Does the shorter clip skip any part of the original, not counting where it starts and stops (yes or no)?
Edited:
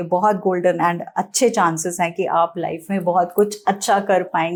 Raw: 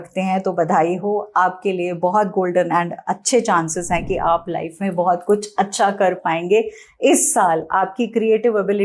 no